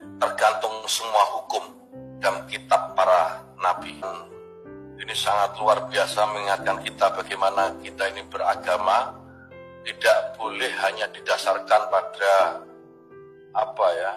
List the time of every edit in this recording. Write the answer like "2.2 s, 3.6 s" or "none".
4.0 s